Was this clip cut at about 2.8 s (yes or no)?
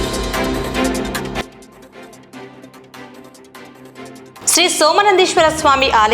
yes